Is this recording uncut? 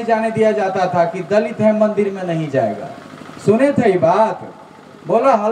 yes; 0 cuts

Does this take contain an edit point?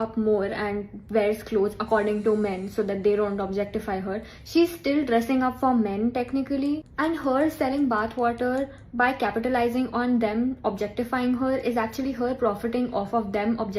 no; 0 cuts

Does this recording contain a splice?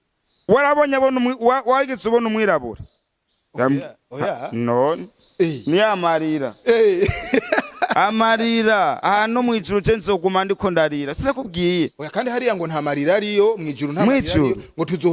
no; 0 cuts

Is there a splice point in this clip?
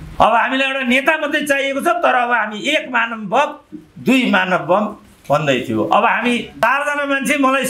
yes; 1 cut; at 6.6 s

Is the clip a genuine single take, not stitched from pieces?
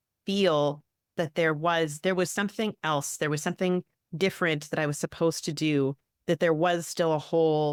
yes; 0 cuts

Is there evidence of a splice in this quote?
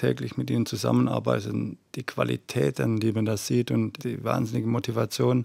yes; 1 cut; at 4.0 s

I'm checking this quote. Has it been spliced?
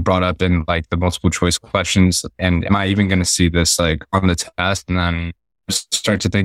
no; 0 cuts

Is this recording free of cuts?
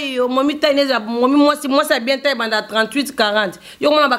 yes; 0 cuts

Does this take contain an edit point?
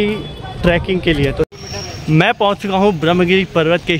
yes; 1 cut; at 1.5 s

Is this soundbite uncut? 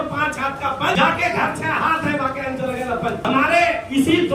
no; 2 cuts; at 0.9 s, 3.2 s

